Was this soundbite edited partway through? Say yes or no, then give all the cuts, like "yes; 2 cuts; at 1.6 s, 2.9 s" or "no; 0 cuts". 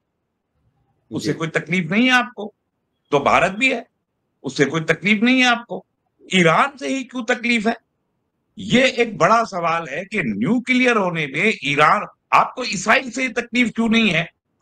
no; 0 cuts